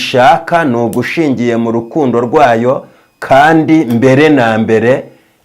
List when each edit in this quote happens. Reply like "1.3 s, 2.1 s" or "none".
none